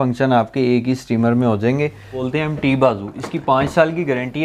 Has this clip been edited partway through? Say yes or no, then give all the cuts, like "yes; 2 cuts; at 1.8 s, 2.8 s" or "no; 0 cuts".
yes; 1 cut; at 2.2 s